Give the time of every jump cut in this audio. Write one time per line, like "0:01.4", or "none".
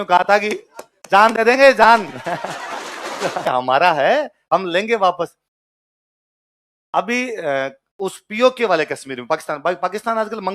0:03.5